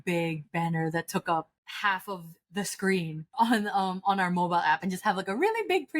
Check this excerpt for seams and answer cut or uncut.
cut